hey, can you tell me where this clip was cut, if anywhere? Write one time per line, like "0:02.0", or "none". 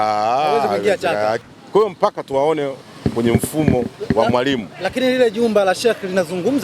0:01.4